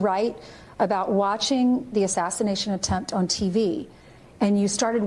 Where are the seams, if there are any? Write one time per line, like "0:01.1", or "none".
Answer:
none